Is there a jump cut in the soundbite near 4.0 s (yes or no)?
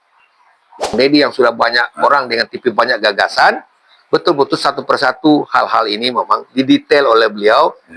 no